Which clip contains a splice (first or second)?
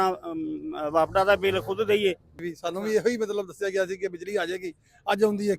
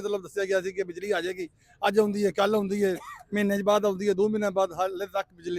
first